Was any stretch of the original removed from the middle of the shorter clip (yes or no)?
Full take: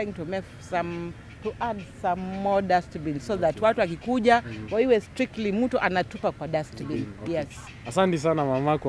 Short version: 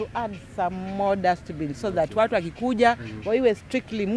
no